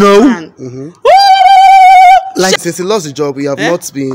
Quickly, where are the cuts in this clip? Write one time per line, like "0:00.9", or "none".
0:02.6